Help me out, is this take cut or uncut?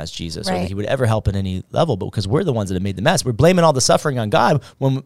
uncut